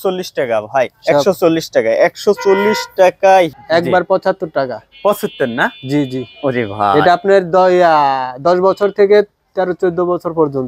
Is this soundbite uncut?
no; 1 cut; at 3.6 s

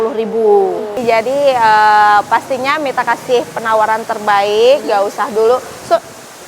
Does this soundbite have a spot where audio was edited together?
yes; 1 cut; at 1.0 s

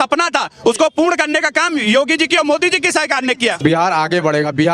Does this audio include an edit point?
yes; 1 cut; at 3.6 s

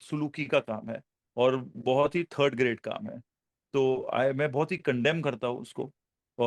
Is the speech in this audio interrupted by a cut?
no; 0 cuts

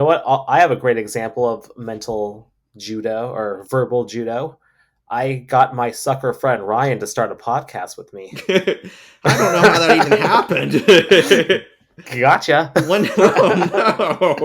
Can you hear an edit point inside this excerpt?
no; 0 cuts

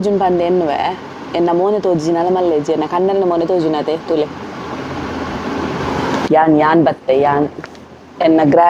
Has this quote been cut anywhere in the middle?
yes; 1 cut; at 6.3 s

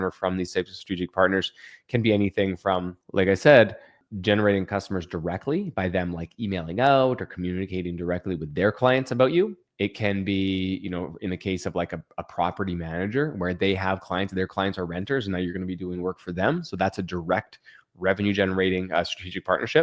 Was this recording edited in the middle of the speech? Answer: yes; 3 cuts; at 3.0 s, 4.0 s, 9.6 s

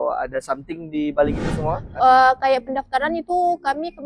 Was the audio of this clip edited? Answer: yes; 1 cut; at 1.9 s

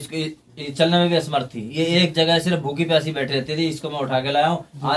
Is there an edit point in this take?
no; 0 cuts

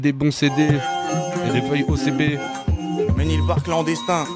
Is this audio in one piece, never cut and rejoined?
yes; 0 cuts

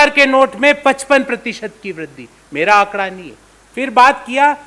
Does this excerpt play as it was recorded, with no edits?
yes; 0 cuts

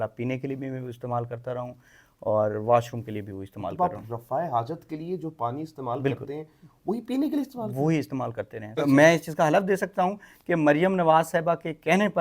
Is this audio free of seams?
no; 1 cut; at 8.8 s

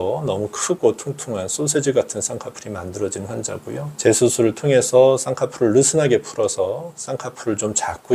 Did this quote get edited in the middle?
no; 0 cuts

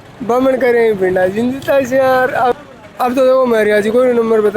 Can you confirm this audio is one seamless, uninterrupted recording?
no; 1 cut; at 2.5 s

